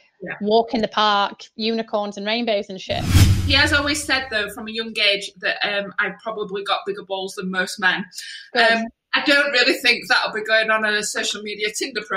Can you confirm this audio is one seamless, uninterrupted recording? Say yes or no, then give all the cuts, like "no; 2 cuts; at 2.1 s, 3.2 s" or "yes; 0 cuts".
no; 1 cut; at 3.3 s